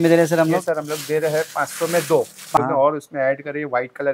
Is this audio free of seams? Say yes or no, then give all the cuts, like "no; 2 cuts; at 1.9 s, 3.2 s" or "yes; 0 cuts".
no; 1 cut; at 2.6 s